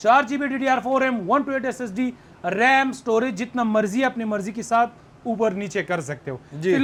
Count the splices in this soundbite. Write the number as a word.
zero